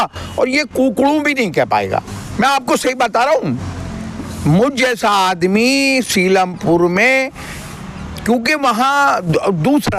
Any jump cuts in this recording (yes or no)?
no